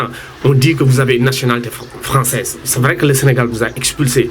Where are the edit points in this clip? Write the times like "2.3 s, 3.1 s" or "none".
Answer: 2.6 s